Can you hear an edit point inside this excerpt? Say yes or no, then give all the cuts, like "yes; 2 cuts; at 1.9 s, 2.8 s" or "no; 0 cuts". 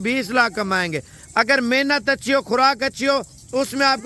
no; 0 cuts